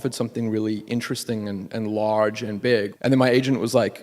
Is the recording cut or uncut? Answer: cut